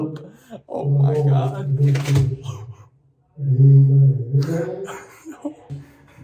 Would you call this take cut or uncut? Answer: uncut